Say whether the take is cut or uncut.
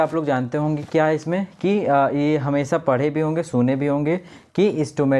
uncut